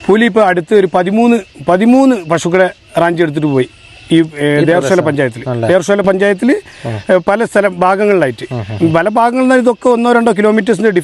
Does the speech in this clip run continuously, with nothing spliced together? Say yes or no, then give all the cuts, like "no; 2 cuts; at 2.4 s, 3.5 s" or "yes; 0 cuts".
yes; 0 cuts